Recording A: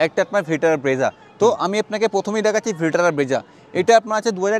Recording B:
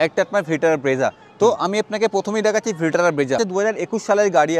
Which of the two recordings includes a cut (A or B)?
B